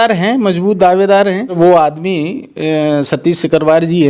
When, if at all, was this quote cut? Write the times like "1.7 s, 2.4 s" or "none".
1.5 s

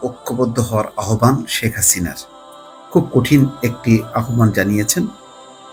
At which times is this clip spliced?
none

